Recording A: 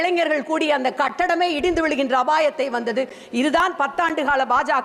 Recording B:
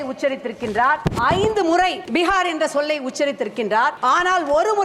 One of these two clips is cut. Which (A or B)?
B